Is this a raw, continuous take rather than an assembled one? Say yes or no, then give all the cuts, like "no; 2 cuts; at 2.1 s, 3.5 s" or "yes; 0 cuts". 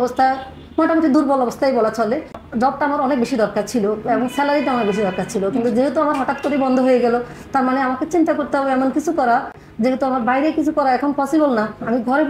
yes; 0 cuts